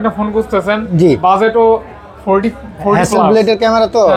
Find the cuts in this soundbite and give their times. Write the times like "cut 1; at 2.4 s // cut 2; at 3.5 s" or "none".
none